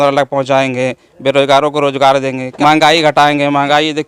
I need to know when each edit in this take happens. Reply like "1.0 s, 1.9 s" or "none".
2.4 s